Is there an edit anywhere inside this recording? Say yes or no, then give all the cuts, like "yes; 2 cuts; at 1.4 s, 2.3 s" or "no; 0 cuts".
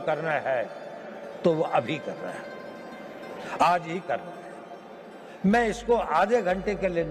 no; 0 cuts